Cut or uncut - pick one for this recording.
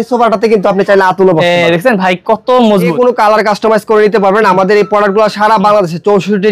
cut